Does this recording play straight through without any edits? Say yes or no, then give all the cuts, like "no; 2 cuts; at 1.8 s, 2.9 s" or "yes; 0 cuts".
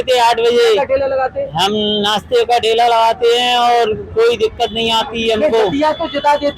yes; 0 cuts